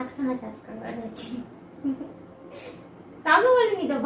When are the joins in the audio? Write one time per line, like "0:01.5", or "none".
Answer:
none